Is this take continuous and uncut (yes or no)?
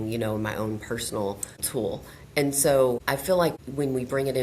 no